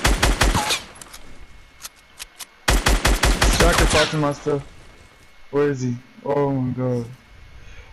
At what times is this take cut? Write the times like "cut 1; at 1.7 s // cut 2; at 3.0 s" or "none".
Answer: none